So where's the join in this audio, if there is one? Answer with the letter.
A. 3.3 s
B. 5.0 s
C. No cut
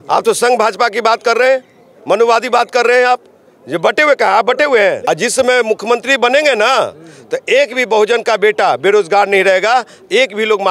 B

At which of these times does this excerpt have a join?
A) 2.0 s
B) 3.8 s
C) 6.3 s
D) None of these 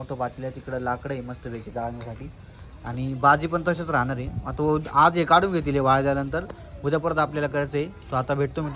D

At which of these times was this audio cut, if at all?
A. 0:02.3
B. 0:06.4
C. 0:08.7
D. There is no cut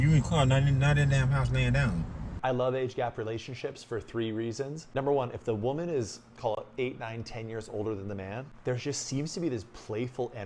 A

